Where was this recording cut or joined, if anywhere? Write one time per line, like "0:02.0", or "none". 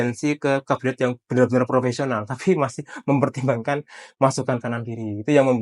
none